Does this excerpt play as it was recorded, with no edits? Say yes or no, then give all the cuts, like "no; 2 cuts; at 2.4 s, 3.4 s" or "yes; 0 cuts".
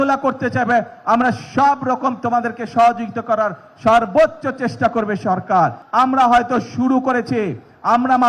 no; 1 cut; at 5.8 s